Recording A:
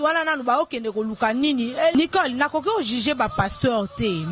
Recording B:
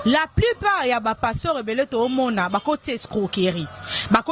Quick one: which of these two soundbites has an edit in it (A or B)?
A